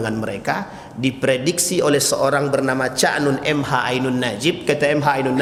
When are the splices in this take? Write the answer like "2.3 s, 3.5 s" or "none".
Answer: none